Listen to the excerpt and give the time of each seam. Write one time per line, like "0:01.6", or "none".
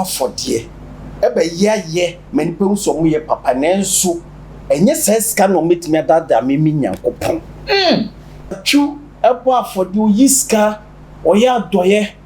0:08.6